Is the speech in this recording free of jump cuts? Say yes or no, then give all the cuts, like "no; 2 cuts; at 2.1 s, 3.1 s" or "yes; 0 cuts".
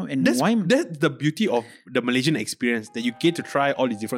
yes; 0 cuts